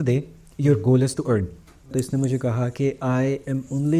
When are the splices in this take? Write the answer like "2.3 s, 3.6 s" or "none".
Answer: 1.9 s